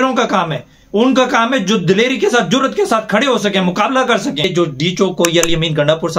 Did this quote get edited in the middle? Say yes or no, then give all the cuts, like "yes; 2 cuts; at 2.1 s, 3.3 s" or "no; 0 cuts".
yes; 1 cut; at 4.5 s